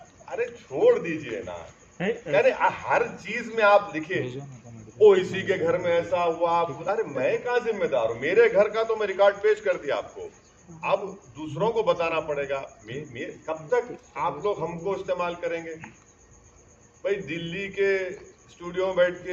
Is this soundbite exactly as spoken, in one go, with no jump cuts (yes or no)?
yes